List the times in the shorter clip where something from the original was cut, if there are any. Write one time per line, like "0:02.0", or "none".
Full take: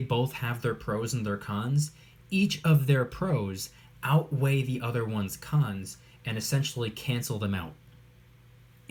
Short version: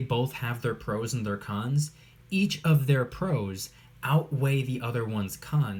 none